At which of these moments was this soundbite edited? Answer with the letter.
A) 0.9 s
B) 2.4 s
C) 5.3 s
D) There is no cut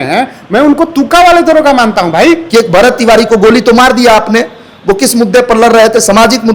B